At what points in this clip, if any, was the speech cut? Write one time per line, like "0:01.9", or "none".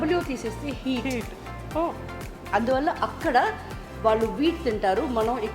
none